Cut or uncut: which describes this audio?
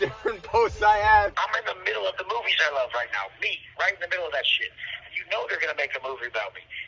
cut